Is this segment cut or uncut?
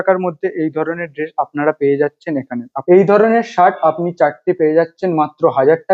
uncut